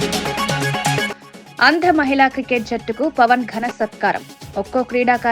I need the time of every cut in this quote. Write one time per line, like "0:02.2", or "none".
0:01.1